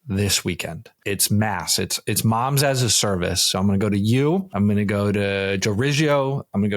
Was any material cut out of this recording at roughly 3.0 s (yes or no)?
no